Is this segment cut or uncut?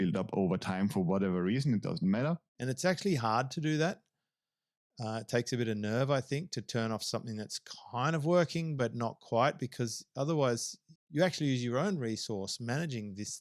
cut